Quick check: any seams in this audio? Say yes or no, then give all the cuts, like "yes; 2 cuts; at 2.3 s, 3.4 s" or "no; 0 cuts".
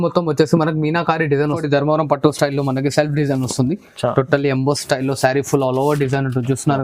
yes; 1 cut; at 1.6 s